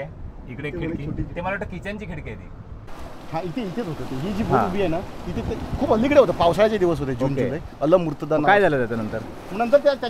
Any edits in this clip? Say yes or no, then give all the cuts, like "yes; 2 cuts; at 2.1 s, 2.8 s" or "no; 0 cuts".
yes; 1 cut; at 3.1 s